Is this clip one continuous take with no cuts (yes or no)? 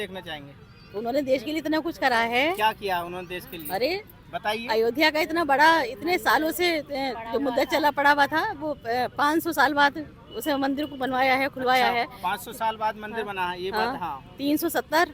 yes